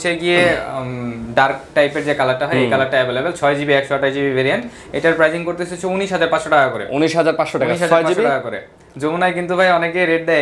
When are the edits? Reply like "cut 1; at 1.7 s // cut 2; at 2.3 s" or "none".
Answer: none